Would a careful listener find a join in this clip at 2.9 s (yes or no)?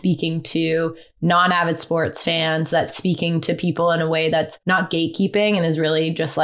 yes